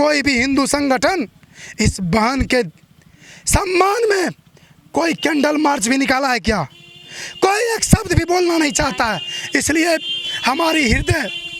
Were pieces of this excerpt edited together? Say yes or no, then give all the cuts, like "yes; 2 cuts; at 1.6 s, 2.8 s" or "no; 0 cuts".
no; 0 cuts